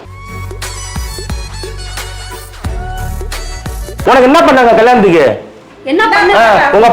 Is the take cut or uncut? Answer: cut